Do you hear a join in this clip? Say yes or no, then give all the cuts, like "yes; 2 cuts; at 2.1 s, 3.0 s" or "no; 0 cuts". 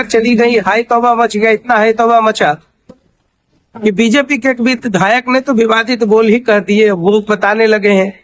no; 0 cuts